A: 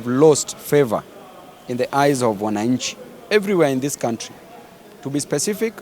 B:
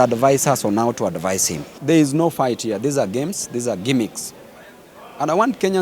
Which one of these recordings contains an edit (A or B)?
B